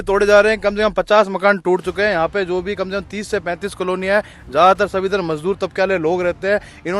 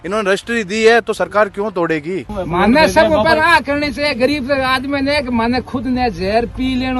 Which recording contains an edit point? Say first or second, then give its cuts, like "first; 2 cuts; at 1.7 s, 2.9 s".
second; 1 cut; at 2.4 s